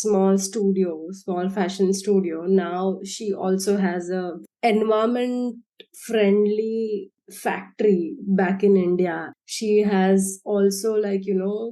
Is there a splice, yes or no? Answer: yes